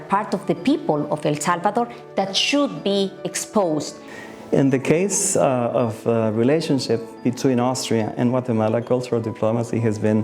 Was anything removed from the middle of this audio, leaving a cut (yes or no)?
yes